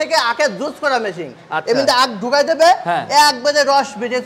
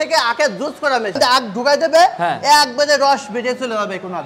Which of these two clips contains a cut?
second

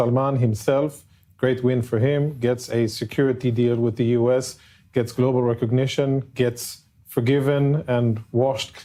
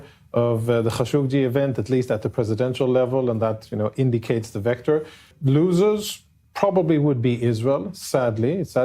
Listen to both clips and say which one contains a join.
second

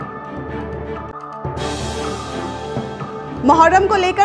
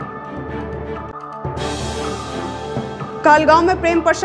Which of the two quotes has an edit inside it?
second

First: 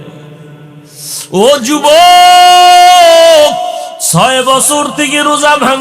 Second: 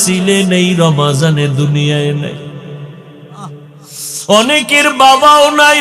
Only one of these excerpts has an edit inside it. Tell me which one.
first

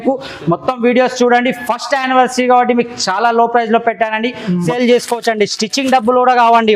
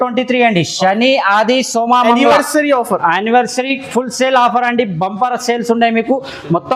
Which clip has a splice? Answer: first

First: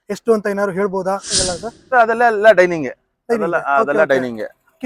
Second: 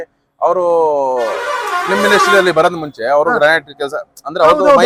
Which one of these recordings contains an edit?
first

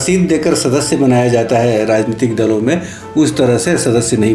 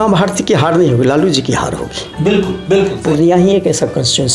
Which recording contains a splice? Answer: second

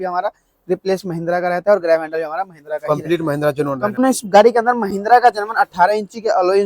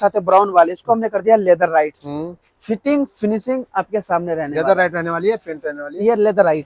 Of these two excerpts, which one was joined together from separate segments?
first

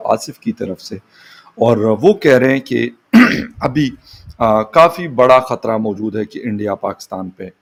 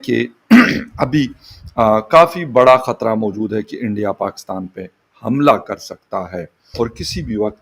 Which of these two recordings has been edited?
second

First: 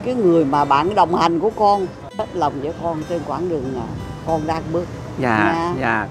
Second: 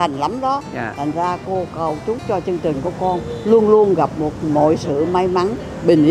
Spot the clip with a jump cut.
first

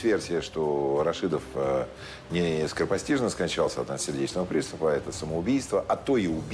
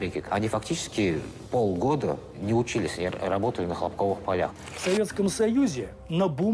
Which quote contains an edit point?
second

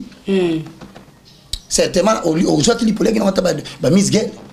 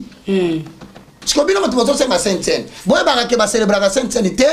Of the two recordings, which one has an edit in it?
second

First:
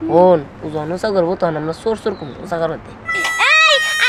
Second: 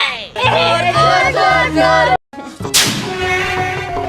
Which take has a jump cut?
second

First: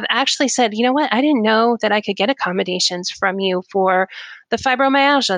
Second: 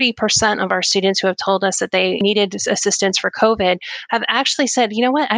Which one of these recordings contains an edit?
second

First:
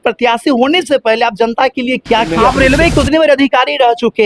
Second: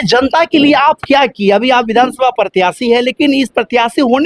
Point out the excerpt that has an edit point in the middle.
first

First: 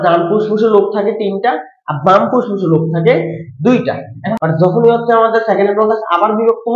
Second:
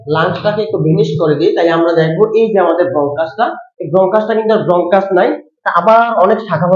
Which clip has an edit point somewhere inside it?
first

